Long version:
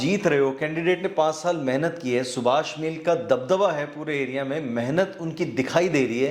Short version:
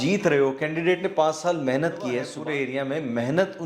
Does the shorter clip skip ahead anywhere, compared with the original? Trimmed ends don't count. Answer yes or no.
yes